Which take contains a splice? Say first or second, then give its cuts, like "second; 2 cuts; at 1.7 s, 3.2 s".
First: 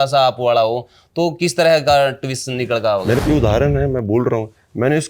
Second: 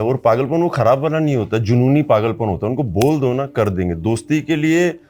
first; 1 cut; at 3.2 s